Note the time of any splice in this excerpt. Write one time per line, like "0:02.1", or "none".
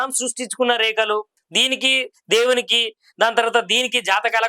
none